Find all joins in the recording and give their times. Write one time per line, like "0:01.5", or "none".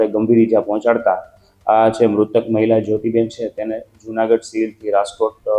none